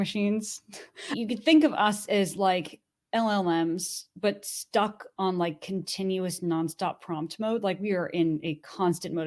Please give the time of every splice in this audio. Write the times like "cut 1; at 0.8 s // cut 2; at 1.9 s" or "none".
cut 1; at 1.1 s

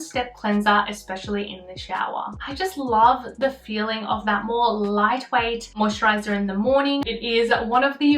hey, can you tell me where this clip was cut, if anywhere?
cut 1; at 2.3 s // cut 2; at 7.0 s

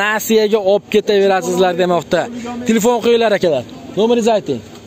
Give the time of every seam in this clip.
none

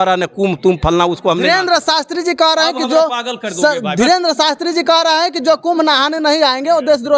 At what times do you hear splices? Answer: none

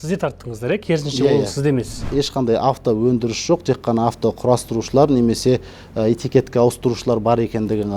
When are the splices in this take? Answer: cut 1; at 2.0 s

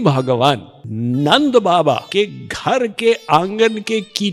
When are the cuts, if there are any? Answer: none

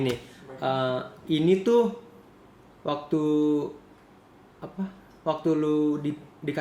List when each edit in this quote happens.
none

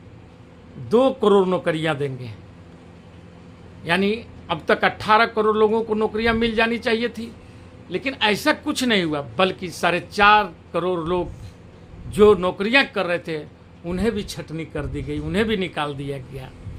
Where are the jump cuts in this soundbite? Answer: none

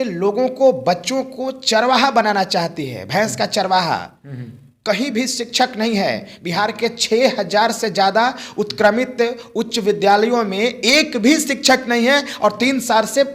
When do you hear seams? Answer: none

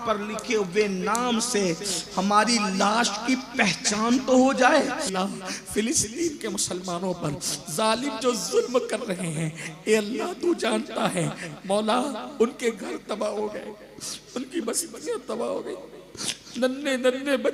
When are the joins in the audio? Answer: cut 1; at 5.1 s

